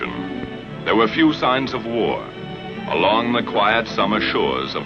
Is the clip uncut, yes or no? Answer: yes